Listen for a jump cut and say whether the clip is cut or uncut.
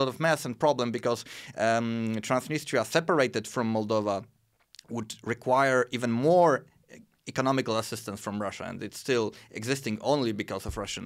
uncut